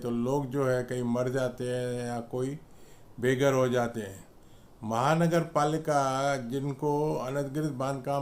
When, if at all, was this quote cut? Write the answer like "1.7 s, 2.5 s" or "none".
none